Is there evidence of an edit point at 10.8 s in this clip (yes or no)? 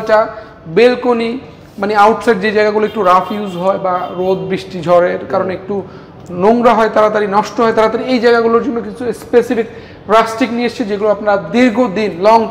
no